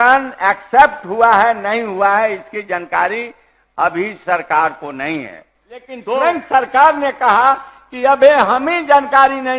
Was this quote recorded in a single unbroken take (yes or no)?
no